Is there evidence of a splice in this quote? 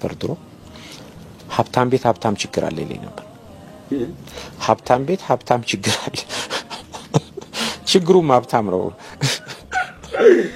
no; 0 cuts

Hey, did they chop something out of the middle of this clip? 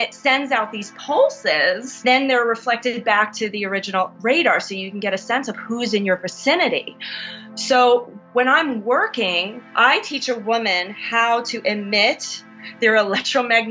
yes; 3 cuts; at 2.0 s, 9.6 s, 12.7 s

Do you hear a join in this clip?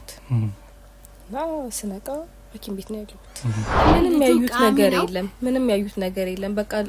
yes; 1 cut; at 3.8 s

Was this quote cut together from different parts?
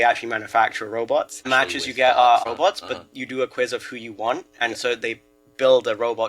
yes; 2 cuts; at 1.4 s, 2.4 s

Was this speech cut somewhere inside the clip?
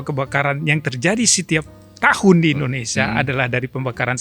no; 0 cuts

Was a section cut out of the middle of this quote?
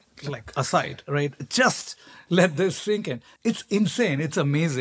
yes; 1 cut; at 3.2 s

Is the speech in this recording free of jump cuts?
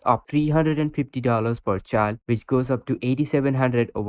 yes; 0 cuts

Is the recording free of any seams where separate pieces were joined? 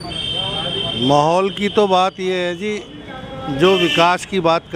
yes; 0 cuts

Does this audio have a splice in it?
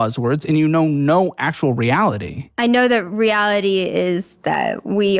no; 0 cuts

